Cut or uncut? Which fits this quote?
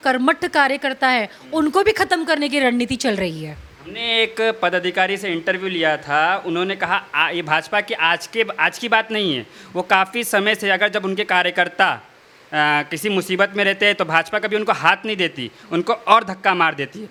uncut